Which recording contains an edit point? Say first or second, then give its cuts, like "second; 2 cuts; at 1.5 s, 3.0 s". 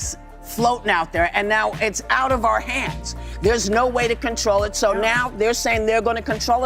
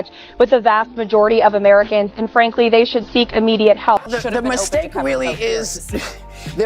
second; 1 cut; at 4.0 s